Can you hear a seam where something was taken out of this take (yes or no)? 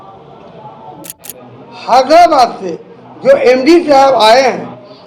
yes